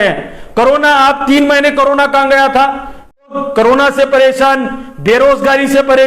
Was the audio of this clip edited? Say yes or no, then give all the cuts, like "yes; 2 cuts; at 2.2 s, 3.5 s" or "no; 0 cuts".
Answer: yes; 1 cut; at 3.3 s